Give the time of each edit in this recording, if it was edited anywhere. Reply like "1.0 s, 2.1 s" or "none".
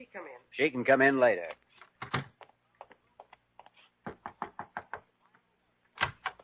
2.5 s